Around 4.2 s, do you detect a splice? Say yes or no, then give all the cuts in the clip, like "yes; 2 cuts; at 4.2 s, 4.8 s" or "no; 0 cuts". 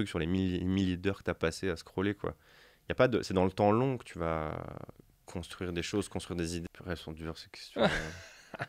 no; 1 cut; at 6.6 s